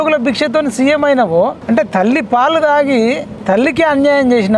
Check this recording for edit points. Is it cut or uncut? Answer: cut